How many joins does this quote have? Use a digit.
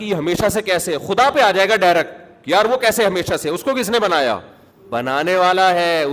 1